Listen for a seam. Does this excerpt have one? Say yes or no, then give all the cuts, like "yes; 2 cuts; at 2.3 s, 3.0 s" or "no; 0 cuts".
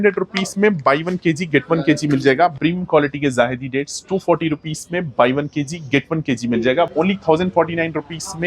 yes; 2 cuts; at 2.5 s, 6.9 s